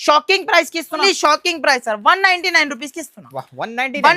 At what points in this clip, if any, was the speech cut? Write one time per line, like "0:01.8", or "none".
0:01.0